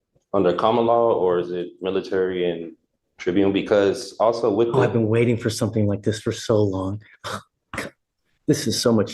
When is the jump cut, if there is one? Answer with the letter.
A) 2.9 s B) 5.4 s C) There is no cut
C